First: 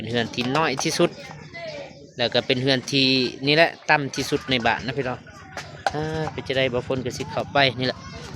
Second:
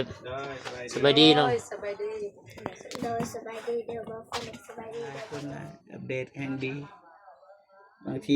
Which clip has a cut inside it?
second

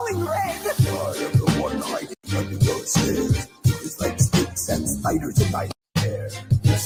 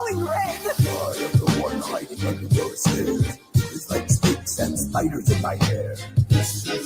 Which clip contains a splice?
second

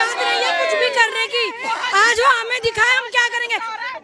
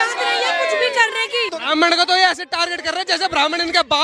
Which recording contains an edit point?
second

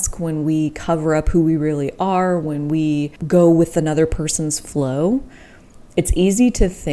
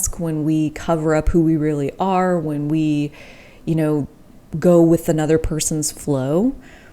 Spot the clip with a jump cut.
first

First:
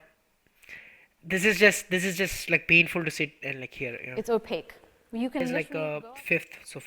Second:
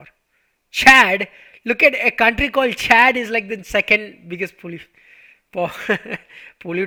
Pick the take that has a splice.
first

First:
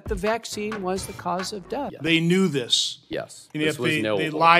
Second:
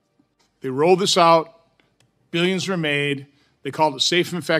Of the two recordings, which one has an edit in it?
first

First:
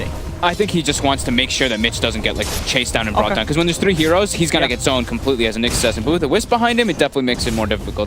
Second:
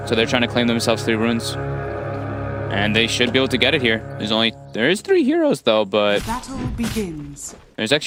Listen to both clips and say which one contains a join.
first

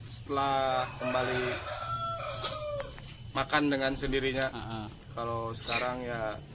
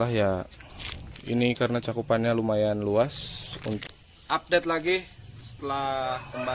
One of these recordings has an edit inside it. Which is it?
second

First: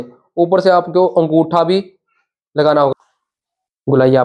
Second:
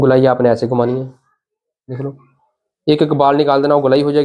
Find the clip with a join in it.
first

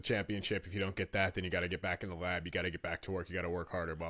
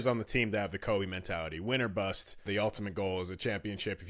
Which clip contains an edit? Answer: second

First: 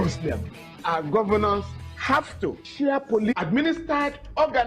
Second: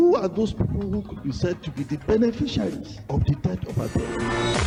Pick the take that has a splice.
first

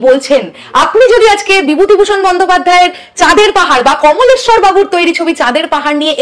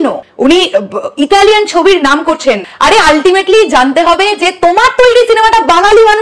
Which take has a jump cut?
second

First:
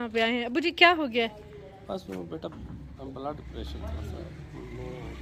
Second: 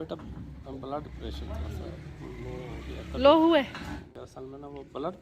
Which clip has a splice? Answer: second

